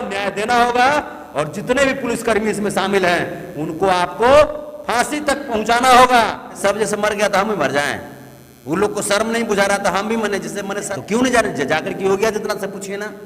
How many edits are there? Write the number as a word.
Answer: two